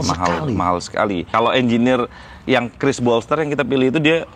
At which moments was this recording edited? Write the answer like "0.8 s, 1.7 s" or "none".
1.2 s